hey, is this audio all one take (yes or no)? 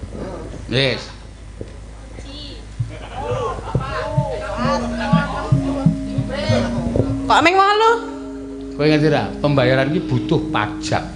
yes